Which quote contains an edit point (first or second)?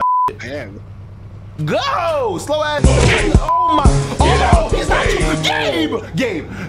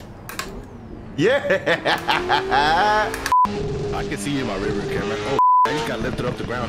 second